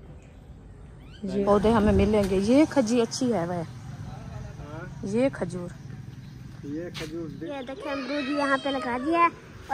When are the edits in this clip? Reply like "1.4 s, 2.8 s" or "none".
1.4 s, 7.5 s